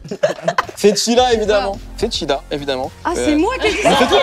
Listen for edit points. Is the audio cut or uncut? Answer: uncut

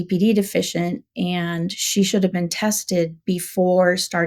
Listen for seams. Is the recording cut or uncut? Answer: uncut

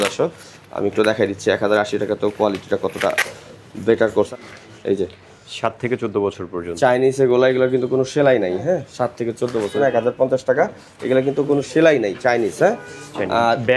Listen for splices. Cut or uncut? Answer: cut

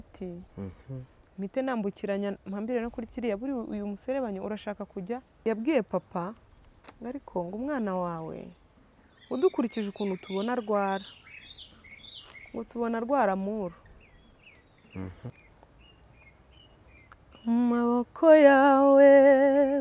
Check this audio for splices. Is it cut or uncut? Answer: cut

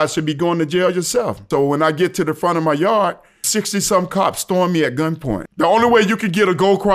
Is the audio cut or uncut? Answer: cut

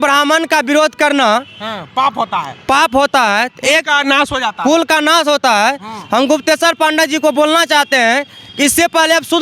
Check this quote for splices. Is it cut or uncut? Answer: uncut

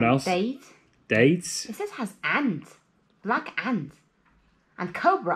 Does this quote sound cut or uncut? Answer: uncut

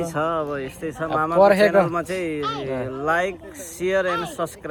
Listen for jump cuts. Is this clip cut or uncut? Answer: uncut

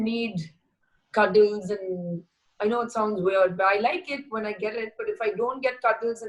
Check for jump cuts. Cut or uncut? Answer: uncut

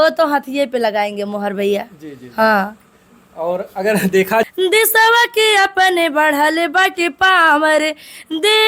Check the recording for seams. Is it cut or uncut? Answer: cut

